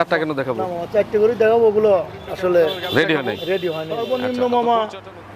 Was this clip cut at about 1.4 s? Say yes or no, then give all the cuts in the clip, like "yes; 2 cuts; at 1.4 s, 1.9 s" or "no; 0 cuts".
no; 1 cut; at 3.9 s